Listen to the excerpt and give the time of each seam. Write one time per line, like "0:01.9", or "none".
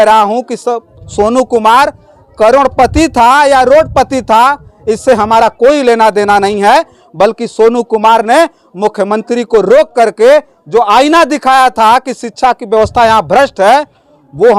none